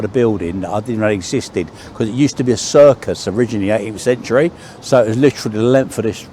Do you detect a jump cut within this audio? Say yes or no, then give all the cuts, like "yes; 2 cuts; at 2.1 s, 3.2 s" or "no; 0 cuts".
no; 0 cuts